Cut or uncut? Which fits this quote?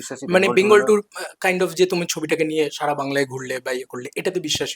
uncut